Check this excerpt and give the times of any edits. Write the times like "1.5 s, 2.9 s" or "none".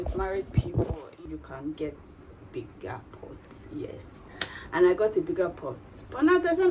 1.0 s